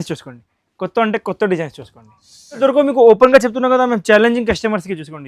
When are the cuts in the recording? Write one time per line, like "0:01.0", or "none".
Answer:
0:02.6